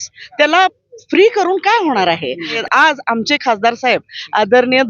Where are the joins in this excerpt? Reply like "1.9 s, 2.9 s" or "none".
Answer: 2.6 s